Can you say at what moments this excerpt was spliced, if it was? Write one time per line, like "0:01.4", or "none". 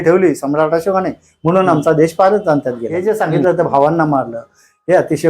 0:02.9